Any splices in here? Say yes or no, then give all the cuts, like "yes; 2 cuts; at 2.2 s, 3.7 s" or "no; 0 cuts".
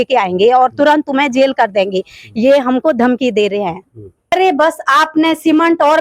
yes; 1 cut; at 4.3 s